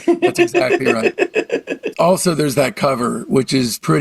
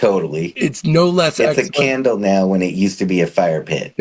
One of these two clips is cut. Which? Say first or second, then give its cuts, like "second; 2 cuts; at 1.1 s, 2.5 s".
first; 1 cut; at 1.8 s